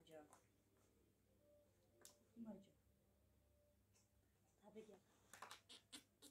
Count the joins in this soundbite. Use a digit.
1